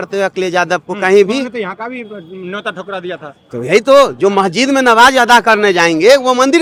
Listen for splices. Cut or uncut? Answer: uncut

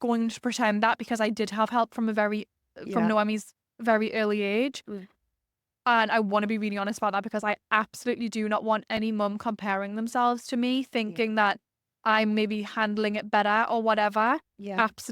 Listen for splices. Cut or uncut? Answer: uncut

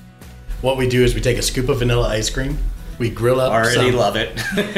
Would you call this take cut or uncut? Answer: uncut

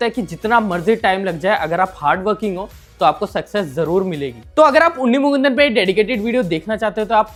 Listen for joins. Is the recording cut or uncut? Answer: uncut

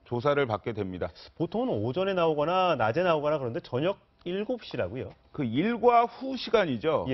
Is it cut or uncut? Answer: uncut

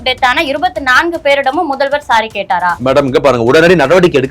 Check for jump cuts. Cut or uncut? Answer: cut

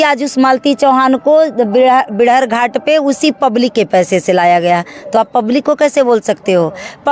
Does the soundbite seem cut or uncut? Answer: uncut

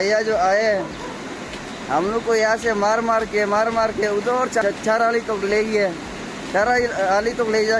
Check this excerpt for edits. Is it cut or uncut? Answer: uncut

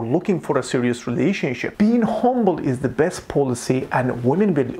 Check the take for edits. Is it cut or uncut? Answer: cut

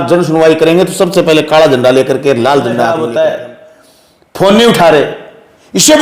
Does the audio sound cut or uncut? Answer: cut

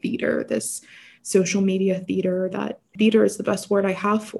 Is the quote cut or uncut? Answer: cut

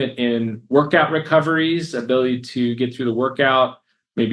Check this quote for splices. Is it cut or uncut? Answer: uncut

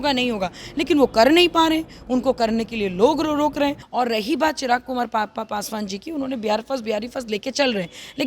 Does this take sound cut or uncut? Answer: cut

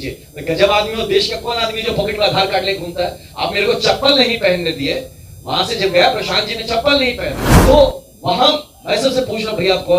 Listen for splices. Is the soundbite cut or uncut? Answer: cut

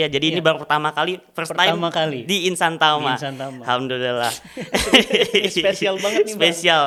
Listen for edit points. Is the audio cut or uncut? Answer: uncut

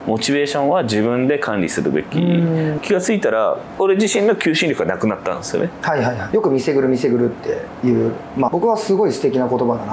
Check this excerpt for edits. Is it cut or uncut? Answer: cut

